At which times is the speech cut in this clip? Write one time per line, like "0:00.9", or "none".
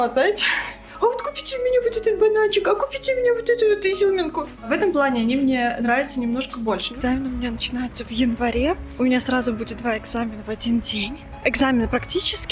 0:00.9
0:04.7
0:06.9
0:08.9
0:11.3